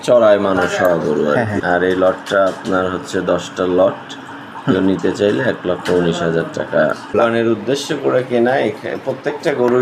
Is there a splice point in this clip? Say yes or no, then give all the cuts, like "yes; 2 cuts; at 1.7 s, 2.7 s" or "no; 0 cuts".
yes; 2 cuts; at 1.6 s, 7.1 s